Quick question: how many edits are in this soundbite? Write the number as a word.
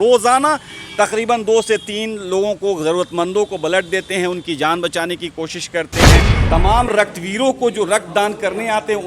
one